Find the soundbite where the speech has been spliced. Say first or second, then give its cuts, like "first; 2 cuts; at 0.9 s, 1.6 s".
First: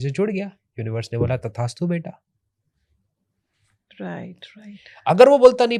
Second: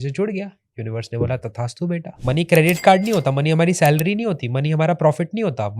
second; 1 cut; at 2.1 s